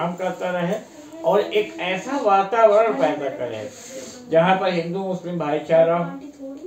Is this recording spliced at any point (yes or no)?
no